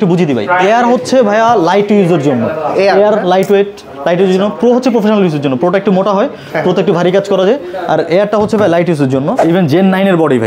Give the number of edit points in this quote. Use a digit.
1